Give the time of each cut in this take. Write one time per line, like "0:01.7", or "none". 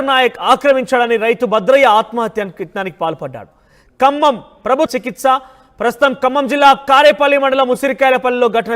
0:04.9